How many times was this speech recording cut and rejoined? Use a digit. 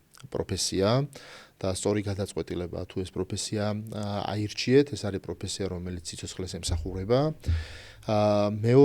0